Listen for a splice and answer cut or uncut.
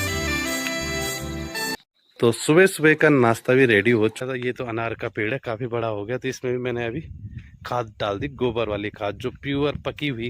cut